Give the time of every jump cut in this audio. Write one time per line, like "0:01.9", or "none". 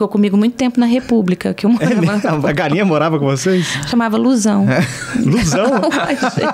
none